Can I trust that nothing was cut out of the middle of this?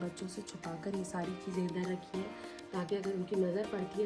yes; 0 cuts

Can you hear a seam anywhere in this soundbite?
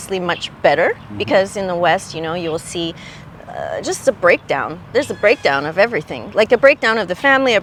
no; 0 cuts

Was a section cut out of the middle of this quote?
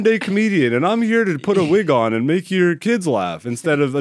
no; 0 cuts

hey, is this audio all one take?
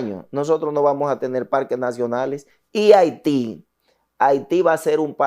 yes; 0 cuts

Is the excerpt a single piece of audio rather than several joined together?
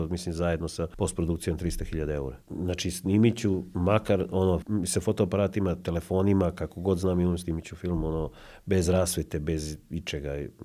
no; 4 cuts; at 0.9 s, 2.4 s, 3.7 s, 4.6 s

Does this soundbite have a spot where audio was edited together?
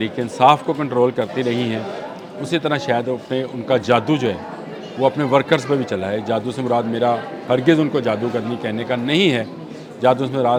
no; 0 cuts

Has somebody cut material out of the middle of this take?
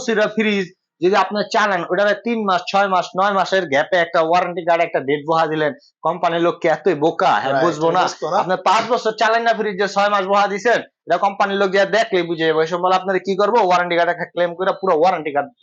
no; 0 cuts

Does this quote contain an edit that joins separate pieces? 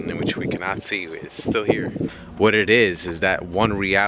yes; 1 cut; at 2.2 s

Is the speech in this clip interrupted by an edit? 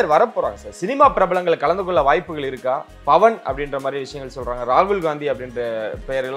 no; 0 cuts

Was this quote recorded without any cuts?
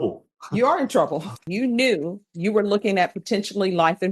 no; 1 cut; at 1.5 s

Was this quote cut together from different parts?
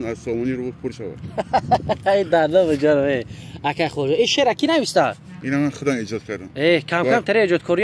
no; 0 cuts

